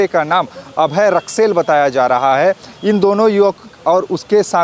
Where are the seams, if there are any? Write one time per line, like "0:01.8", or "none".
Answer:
none